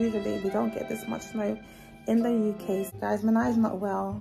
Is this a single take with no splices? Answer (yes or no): no